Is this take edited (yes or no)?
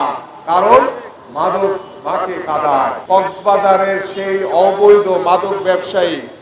yes